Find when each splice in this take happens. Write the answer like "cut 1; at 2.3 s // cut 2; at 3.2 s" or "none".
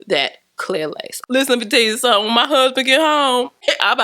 cut 1; at 1.2 s

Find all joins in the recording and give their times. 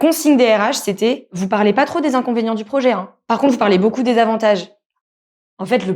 cut 1; at 1.3 s

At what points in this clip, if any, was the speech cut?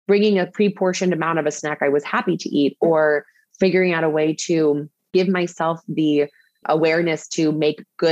cut 1; at 5.1 s

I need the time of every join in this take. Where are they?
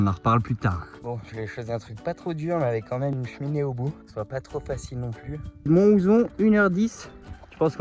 cut 1; at 0.9 s // cut 2; at 4.0 s // cut 3; at 5.7 s

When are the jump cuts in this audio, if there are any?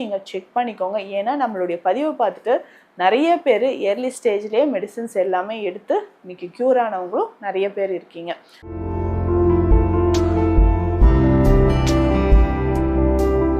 cut 1; at 8.5 s

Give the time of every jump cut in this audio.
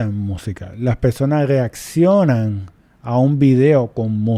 none

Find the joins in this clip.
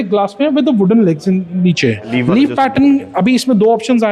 cut 1; at 2.1 s

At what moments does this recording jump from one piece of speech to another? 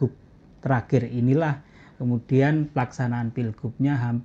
none

